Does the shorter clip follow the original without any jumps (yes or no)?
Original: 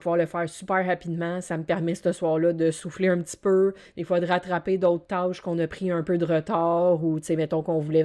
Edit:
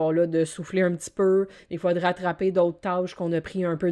yes